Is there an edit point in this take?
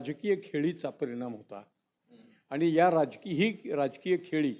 no; 0 cuts

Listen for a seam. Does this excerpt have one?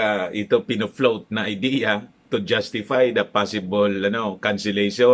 no; 0 cuts

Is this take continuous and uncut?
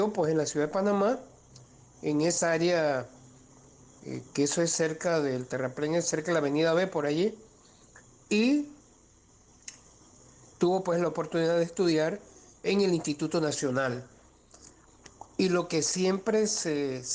yes; 0 cuts

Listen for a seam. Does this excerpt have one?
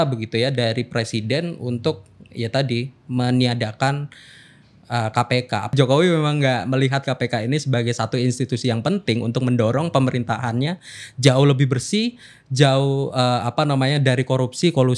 yes; 1 cut; at 5.7 s

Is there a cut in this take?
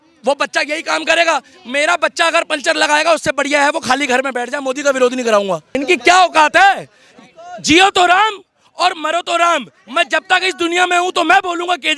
yes; 1 cut; at 5.7 s

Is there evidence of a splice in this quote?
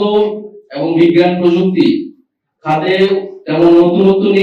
no; 0 cuts

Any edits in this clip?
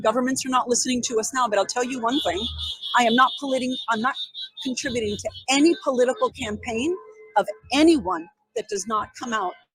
no; 0 cuts

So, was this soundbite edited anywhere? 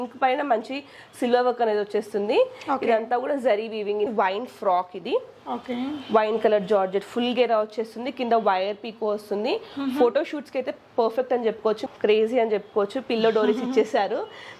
yes; 2 cuts; at 4.1 s, 11.8 s

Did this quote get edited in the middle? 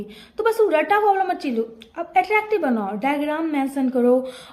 no; 0 cuts

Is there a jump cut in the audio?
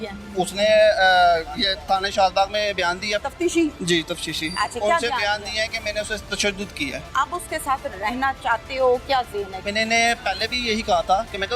yes; 3 cuts; at 3.2 s, 7.0 s, 9.6 s

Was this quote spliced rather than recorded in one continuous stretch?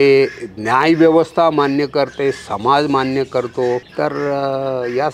yes; 1 cut; at 3.9 s

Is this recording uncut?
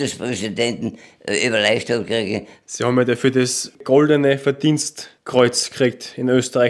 yes; 0 cuts

